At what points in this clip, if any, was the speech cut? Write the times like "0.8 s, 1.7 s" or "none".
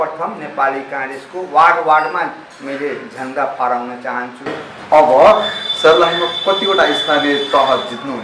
4.6 s